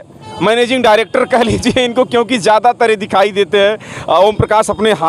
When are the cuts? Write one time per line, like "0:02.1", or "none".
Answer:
none